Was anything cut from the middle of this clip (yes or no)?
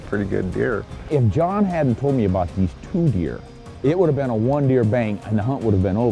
no